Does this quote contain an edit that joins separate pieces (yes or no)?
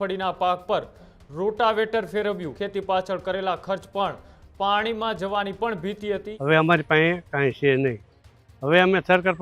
yes